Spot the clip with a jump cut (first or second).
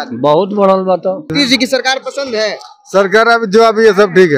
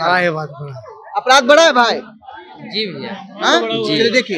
first